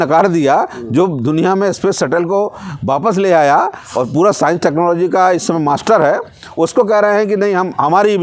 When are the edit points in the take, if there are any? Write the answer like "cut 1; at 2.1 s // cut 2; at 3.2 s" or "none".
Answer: none